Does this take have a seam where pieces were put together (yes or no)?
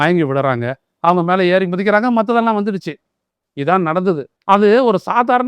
yes